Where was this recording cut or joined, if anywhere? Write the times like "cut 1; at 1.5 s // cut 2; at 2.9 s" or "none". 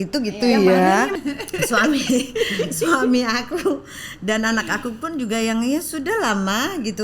cut 1; at 1.1 s